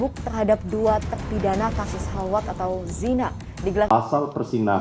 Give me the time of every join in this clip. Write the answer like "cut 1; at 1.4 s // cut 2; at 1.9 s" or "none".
cut 1; at 3.9 s